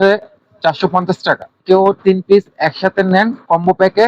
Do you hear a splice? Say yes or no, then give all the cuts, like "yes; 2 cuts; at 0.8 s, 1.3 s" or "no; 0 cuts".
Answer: yes; 1 cut; at 1.6 s